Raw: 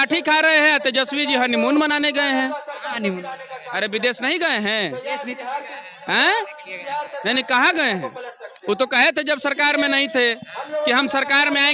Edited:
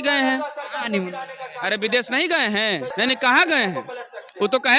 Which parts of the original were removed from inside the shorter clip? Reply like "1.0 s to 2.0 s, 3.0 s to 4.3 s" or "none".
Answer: 5.0 s to 7.2 s